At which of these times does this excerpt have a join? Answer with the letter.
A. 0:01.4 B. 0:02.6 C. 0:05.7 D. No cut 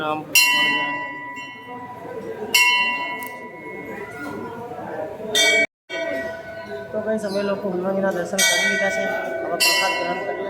C